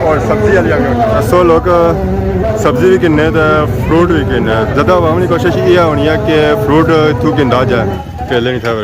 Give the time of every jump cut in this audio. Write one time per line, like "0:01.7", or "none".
0:07.9